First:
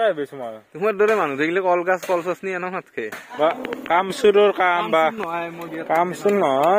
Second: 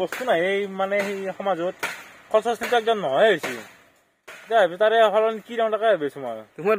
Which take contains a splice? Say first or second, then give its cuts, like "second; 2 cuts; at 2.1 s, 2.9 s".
first; 1 cut; at 3.2 s